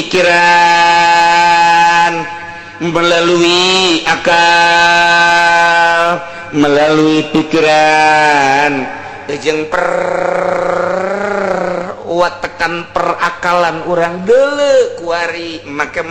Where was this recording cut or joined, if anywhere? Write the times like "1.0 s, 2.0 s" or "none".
none